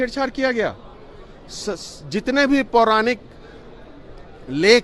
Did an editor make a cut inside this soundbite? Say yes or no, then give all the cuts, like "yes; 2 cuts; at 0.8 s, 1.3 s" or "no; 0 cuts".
no; 0 cuts